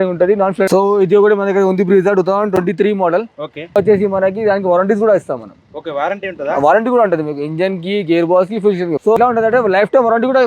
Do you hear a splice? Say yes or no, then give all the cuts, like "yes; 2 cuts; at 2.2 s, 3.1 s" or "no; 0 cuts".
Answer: yes; 2 cuts; at 3.8 s, 9.0 s